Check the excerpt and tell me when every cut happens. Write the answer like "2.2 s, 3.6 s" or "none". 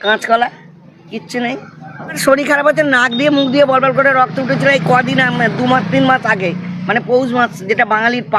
2.2 s